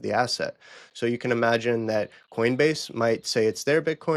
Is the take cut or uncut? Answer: uncut